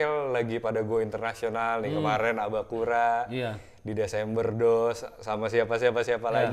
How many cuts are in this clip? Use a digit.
0